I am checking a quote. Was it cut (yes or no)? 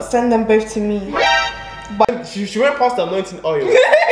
yes